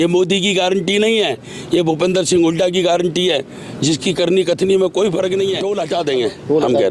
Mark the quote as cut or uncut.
cut